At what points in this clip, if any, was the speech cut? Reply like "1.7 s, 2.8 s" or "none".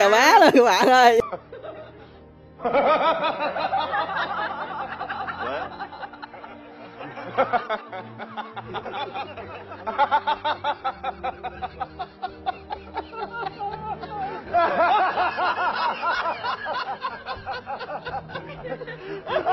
1.2 s